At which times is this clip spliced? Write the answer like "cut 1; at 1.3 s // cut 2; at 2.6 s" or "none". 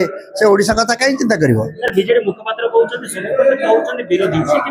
none